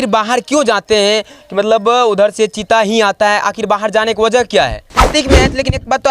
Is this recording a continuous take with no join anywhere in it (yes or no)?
no